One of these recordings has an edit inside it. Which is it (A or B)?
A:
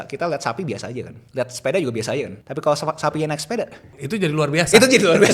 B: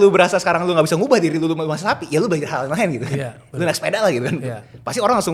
A